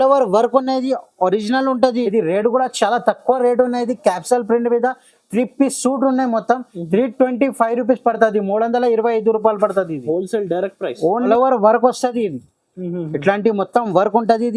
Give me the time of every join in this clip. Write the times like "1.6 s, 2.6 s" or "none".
2.1 s, 11.3 s